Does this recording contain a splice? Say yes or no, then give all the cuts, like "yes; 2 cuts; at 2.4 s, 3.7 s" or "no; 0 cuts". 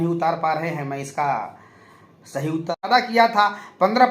yes; 1 cut; at 2.9 s